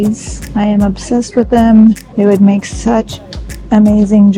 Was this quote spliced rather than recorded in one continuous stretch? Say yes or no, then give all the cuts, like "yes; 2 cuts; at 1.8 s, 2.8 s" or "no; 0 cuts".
no; 0 cuts